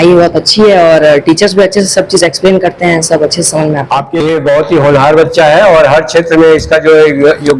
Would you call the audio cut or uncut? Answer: cut